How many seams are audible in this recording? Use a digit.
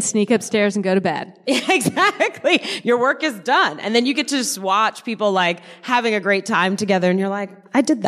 0